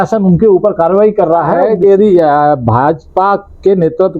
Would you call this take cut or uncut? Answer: cut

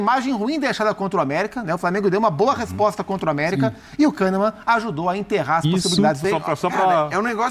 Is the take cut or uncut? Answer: cut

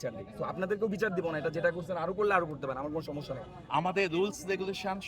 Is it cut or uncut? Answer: cut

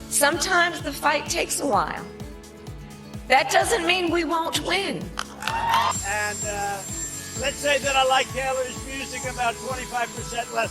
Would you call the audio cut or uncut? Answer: cut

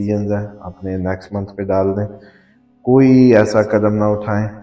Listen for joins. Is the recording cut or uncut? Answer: uncut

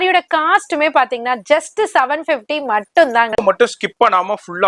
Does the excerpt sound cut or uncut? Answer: uncut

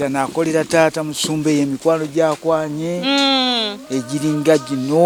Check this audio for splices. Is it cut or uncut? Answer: uncut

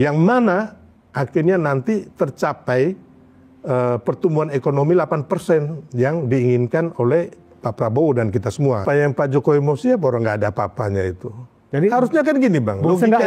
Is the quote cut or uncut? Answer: cut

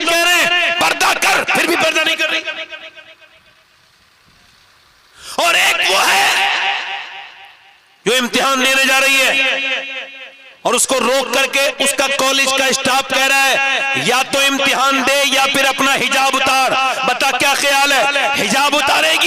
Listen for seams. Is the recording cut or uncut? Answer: uncut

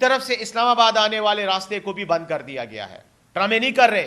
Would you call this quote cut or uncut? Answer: cut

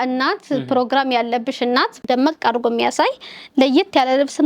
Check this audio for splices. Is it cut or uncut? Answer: cut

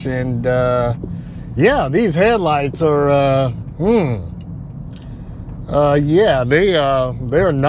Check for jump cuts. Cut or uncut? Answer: uncut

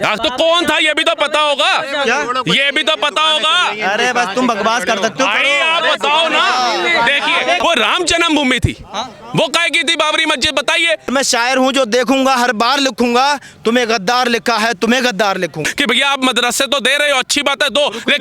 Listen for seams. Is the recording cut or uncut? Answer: cut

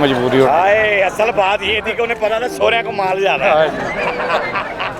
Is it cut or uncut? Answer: uncut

